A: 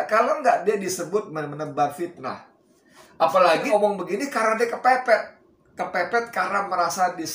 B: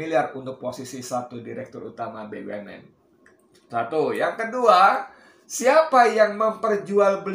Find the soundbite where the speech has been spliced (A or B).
A